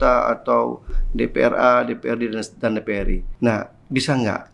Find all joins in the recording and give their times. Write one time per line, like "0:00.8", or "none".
0:03.2